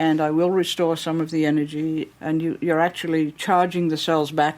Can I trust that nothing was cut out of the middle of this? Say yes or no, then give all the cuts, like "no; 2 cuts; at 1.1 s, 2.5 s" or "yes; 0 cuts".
no; 1 cut; at 2.1 s